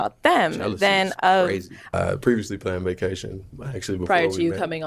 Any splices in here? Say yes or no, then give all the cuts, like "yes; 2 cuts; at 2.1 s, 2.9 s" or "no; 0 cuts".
yes; 1 cut; at 1.9 s